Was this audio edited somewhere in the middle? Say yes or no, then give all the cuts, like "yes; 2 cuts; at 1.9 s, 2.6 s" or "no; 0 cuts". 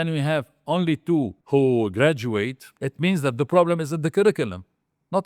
yes; 2 cuts; at 1.4 s, 2.7 s